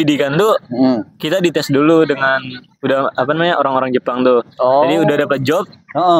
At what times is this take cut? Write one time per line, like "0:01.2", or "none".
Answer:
none

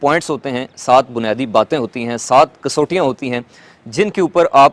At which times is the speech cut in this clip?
none

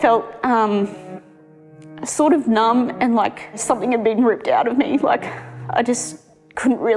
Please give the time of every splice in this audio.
0:03.6

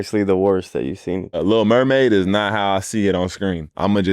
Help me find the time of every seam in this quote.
0:01.4

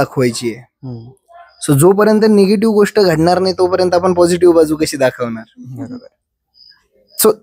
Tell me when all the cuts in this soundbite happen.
none

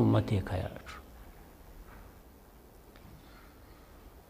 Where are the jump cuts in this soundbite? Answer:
0:02.2

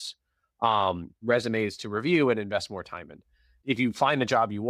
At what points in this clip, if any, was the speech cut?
0:03.5

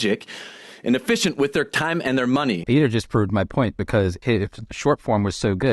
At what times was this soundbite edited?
0:02.7
0:04.2

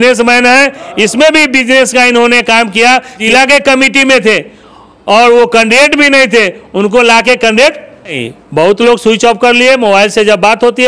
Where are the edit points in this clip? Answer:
0:03.2
0:08.3

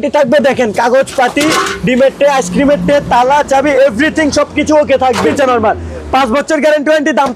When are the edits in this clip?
0:05.3

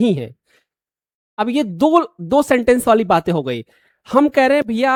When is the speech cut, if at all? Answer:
none

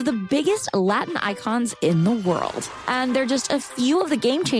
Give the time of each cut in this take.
none

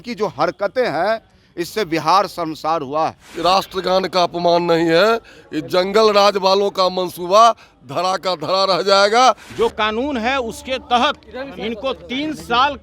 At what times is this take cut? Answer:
0:03.3
0:09.5

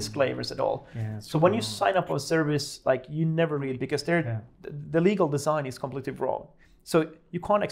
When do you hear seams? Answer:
none

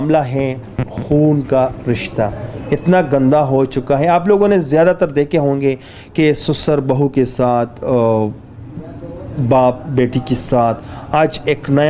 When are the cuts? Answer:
none

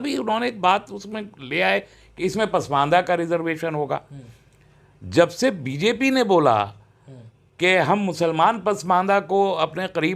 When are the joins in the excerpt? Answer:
none

